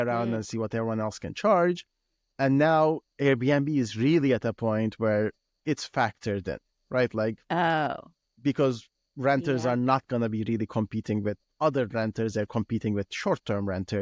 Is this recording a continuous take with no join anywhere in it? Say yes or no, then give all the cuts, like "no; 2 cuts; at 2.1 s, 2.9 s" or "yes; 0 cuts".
yes; 0 cuts